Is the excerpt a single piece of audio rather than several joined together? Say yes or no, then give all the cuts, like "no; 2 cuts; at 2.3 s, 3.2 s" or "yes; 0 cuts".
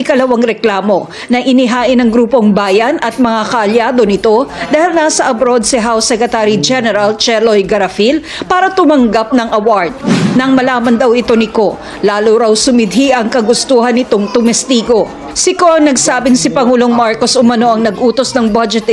yes; 0 cuts